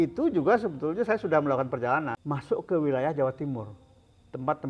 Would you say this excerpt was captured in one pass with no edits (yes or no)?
no